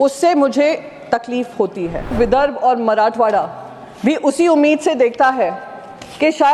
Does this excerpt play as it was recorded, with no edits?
no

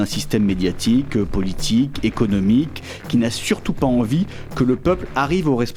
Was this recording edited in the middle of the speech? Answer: no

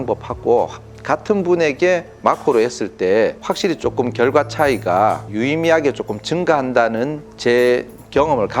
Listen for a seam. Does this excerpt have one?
no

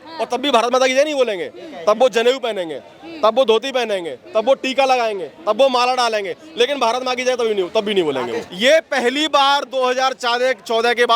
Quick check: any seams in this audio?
yes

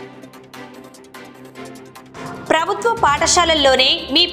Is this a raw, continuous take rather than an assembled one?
no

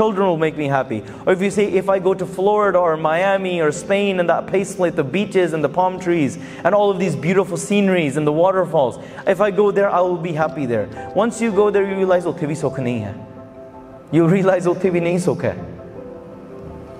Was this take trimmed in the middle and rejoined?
no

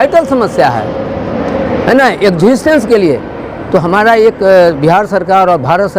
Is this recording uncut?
yes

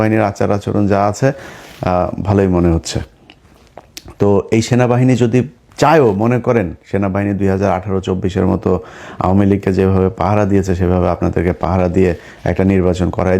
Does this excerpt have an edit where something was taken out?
no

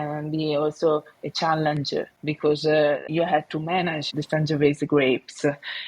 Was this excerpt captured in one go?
no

